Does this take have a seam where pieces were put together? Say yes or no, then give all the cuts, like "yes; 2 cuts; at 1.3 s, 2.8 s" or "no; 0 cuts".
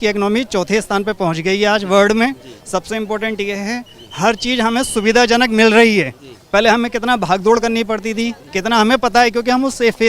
no; 0 cuts